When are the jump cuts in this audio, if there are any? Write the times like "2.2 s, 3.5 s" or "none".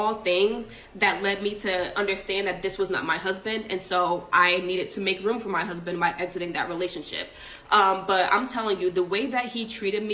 1.8 s